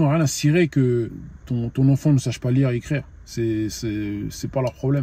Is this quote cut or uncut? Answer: uncut